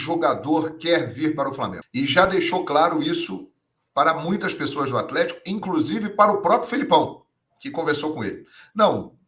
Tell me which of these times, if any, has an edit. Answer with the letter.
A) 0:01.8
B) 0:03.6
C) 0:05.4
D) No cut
A